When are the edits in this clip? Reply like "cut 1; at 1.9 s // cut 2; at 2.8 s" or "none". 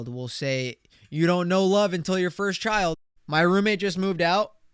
cut 1; at 3.1 s